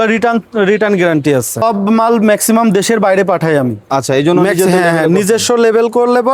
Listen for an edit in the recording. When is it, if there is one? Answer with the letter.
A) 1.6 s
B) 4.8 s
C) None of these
A